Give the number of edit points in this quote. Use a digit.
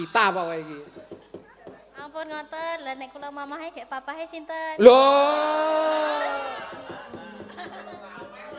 1